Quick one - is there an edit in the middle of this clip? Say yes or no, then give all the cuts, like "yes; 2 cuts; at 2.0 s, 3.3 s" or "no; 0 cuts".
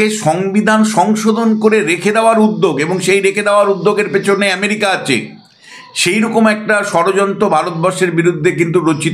no; 0 cuts